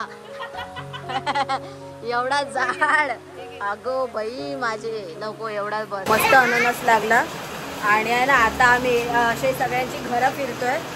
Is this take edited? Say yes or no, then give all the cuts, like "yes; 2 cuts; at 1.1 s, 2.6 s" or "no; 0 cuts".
no; 0 cuts